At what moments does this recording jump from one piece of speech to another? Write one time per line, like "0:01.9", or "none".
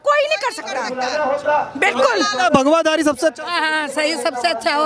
none